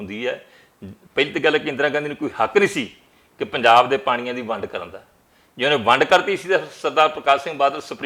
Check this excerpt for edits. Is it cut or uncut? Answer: uncut